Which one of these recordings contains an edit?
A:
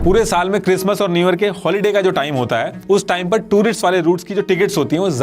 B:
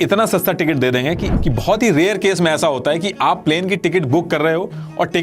B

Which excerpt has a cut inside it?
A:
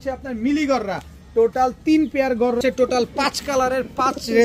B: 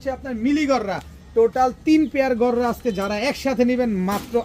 A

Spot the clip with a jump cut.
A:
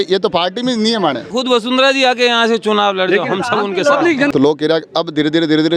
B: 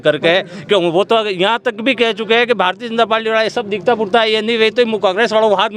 A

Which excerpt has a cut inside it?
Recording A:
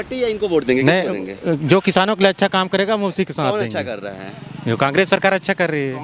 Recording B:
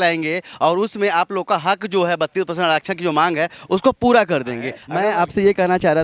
B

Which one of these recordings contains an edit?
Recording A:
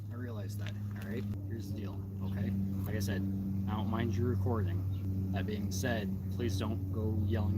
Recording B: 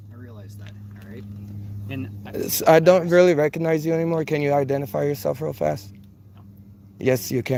A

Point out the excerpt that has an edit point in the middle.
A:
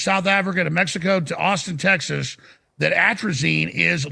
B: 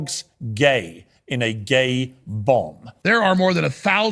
B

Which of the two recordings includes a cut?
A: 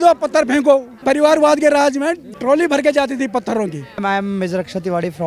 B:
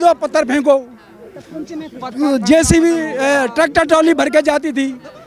A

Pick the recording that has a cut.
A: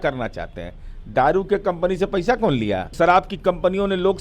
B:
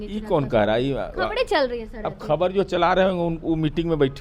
A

